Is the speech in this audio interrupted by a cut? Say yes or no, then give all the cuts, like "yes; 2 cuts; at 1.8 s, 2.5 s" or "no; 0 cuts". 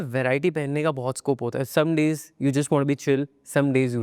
no; 0 cuts